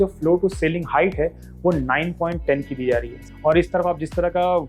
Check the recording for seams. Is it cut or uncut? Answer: cut